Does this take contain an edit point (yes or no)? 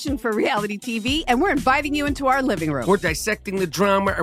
yes